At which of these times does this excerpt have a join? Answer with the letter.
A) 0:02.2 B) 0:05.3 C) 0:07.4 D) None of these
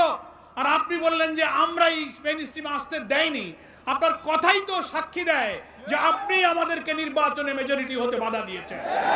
D